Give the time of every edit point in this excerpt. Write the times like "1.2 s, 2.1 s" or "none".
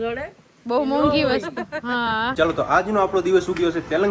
2.3 s